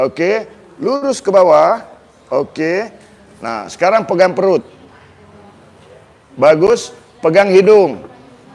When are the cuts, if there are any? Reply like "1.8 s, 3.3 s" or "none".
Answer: none